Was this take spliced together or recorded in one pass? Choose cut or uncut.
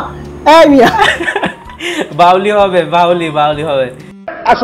uncut